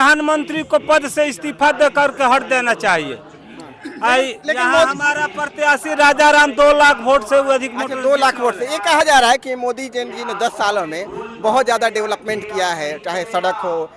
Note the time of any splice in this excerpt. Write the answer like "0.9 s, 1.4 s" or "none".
none